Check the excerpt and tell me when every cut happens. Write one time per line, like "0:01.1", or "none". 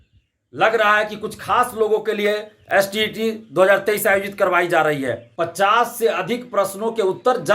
0:05.2